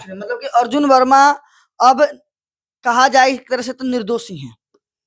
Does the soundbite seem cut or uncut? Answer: uncut